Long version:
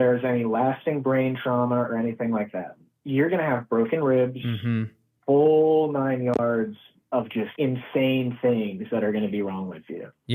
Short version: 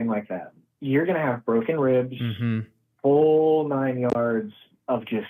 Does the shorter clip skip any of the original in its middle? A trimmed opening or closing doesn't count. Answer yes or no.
no